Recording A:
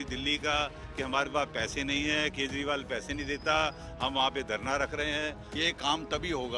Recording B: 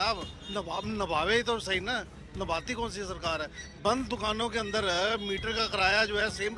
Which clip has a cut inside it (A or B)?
A